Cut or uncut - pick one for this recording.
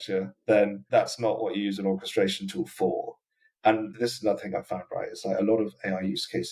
uncut